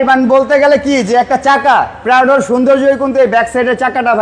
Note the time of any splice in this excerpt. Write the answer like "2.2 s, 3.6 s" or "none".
none